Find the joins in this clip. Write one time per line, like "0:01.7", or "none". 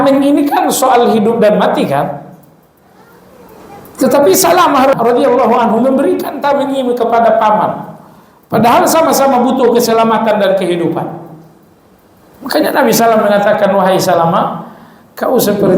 0:04.9